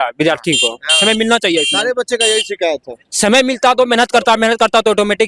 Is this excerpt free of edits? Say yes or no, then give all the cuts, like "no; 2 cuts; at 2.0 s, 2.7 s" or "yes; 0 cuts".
yes; 0 cuts